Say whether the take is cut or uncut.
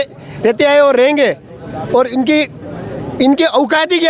uncut